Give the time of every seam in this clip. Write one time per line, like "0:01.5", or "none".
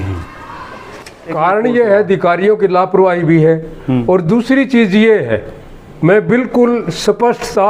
0:01.3